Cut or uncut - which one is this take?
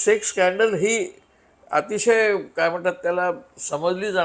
uncut